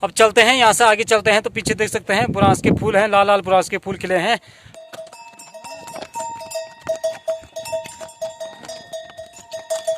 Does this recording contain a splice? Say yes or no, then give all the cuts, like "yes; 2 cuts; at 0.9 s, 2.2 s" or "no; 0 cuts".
no; 0 cuts